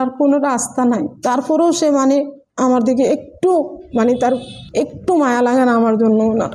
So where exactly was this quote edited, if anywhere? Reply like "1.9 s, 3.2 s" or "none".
4.6 s